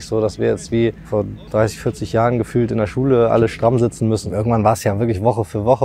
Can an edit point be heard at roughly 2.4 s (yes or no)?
no